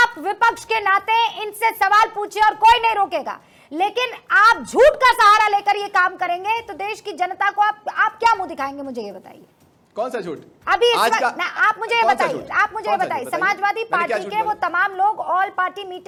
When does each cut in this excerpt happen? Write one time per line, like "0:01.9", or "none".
none